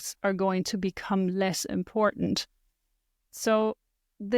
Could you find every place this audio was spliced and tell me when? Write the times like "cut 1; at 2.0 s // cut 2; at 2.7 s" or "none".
none